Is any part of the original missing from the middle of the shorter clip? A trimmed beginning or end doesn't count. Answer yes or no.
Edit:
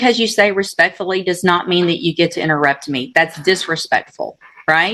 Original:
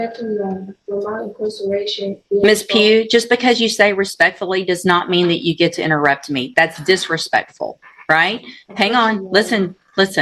no